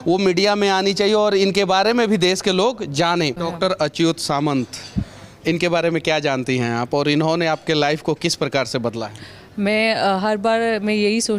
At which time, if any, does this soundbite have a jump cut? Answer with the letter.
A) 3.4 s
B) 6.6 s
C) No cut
A